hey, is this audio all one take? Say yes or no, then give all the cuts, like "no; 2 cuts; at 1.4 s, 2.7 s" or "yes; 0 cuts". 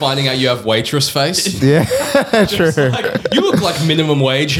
yes; 0 cuts